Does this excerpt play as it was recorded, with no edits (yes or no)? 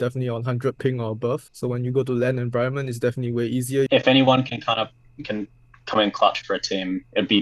no